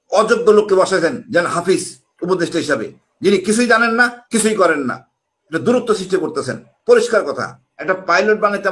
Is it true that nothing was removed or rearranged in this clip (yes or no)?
no